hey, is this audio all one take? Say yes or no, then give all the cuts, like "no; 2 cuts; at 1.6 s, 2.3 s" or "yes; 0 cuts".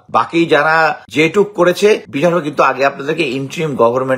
no; 2 cuts; at 1.0 s, 2.1 s